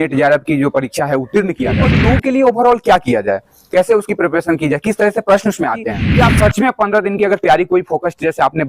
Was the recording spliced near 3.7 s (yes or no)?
no